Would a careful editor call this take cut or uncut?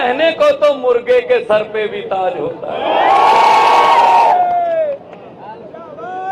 uncut